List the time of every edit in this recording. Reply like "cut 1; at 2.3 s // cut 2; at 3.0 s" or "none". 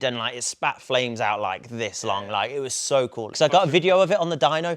cut 1; at 3.3 s